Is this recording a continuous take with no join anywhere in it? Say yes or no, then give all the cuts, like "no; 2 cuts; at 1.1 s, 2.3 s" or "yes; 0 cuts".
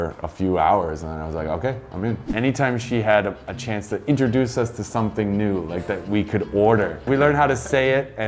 no; 2 cuts; at 2.3 s, 7.1 s